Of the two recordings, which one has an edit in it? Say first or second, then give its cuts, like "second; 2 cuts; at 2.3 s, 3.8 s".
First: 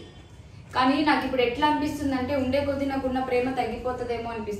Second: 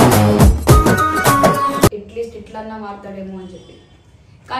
second; 1 cut; at 1.9 s